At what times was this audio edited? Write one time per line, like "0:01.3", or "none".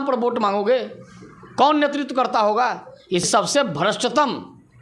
0:03.3